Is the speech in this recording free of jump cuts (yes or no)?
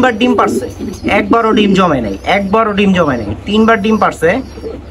yes